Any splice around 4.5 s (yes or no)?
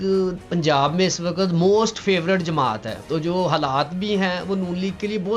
no